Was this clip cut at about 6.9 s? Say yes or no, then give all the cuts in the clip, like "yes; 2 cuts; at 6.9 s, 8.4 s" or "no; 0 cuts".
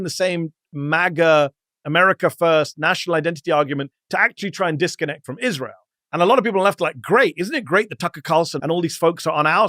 no; 1 cut; at 8.5 s